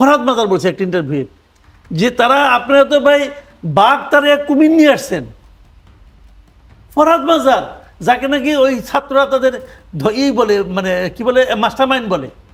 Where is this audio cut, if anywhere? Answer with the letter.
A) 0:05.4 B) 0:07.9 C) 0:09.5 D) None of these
D